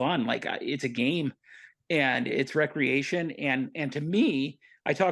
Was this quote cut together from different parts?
no; 0 cuts

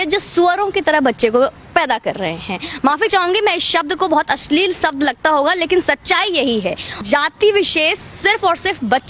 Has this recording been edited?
yes; 1 cut; at 7.0 s

